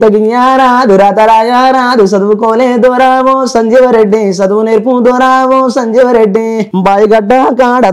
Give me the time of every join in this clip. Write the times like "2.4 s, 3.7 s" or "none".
6.7 s